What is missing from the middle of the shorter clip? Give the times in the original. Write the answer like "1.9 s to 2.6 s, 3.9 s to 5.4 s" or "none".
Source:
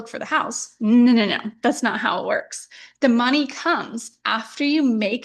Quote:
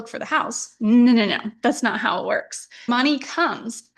2.9 s to 3.2 s